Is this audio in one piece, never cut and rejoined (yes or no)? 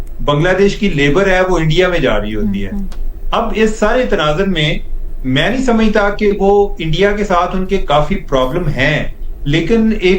yes